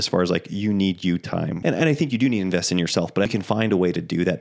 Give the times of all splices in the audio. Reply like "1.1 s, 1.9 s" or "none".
1.5 s, 3.3 s